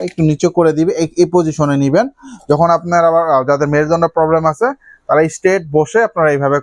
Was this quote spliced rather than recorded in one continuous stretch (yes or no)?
no